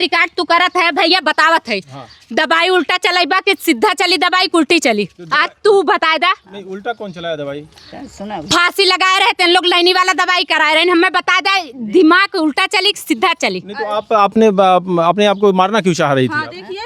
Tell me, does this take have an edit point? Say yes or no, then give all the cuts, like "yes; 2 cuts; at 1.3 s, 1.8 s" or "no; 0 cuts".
no; 0 cuts